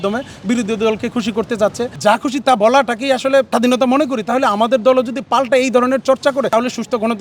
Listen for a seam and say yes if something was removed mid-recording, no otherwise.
yes